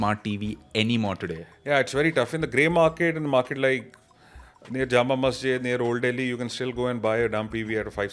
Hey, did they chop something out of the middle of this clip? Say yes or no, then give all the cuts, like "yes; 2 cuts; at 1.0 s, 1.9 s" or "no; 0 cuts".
no; 0 cuts